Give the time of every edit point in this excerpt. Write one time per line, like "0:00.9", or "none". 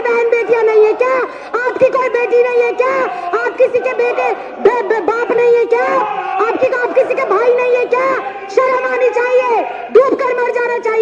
none